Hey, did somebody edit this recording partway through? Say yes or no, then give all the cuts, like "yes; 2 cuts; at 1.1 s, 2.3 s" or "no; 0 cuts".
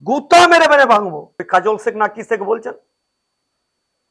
yes; 1 cut; at 1.3 s